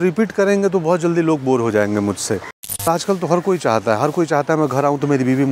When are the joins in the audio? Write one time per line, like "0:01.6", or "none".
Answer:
0:02.9

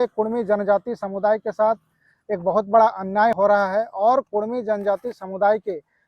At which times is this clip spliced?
0:03.4

